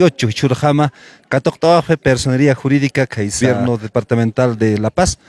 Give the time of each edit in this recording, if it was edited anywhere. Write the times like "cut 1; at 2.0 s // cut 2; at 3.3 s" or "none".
cut 1; at 3.4 s